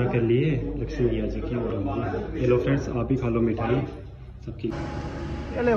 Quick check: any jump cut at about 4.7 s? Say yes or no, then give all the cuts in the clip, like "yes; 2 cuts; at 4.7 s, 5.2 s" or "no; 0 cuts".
yes; 1 cut; at 4.7 s